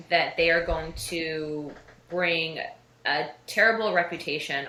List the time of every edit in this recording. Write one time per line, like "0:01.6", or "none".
none

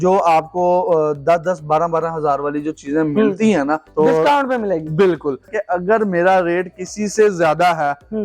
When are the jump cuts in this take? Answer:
0:03.9
0:05.5

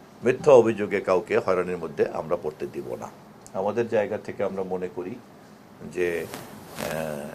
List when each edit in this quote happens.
0:03.2

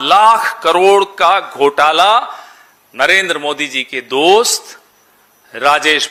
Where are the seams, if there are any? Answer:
none

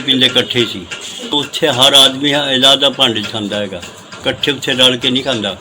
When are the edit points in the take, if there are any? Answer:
0:01.3

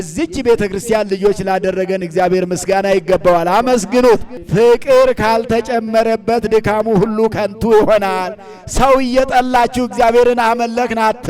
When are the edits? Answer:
0:04.4

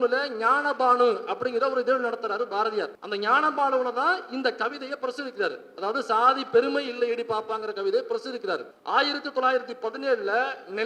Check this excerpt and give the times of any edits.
0:03.0
0:08.7

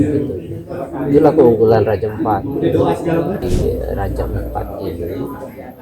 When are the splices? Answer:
0:03.4

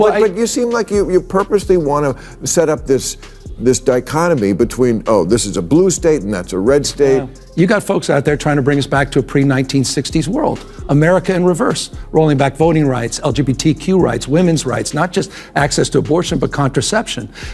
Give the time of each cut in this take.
0:07.4

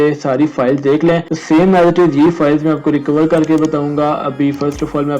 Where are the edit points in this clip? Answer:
0:01.3

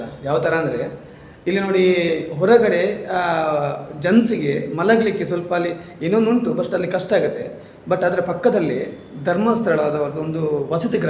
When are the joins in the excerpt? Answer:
none

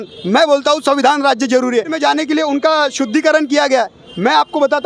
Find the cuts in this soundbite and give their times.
0:01.9

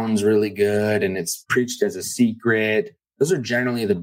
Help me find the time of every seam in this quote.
0:01.4

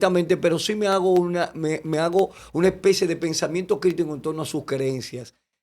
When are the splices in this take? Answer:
none

